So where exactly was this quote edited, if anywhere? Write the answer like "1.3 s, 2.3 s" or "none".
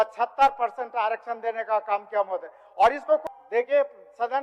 3.2 s

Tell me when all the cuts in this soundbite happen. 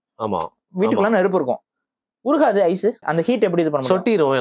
3.0 s

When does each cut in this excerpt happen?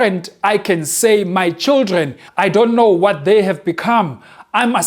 2.2 s

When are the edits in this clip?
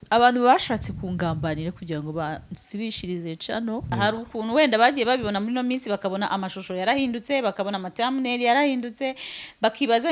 3.9 s

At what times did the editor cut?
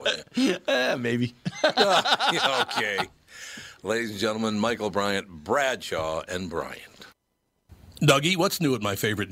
7.9 s

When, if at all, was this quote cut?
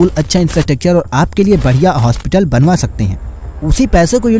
none

